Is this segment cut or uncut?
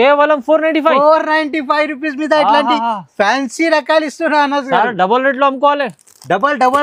uncut